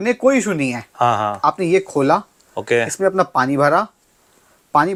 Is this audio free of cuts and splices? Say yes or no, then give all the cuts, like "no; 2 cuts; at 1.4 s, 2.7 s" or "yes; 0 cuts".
yes; 0 cuts